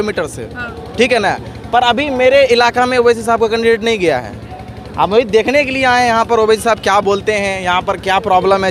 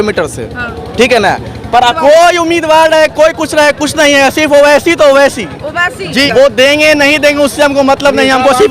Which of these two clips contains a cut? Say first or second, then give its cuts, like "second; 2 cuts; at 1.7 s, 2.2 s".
second; 2 cuts; at 1.9 s, 6.3 s